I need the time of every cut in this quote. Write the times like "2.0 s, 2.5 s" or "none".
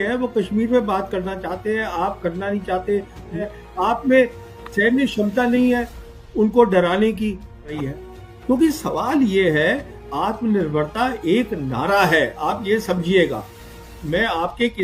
3.4 s, 8.0 s